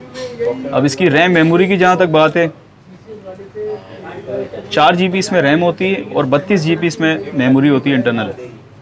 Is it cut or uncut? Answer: uncut